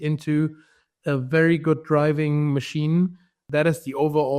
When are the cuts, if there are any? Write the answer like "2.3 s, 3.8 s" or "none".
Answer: 3.4 s